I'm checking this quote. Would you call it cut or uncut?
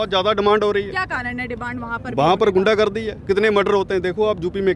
uncut